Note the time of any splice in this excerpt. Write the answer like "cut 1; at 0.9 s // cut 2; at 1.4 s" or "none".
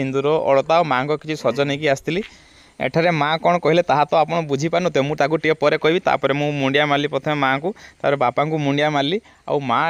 cut 1; at 2.4 s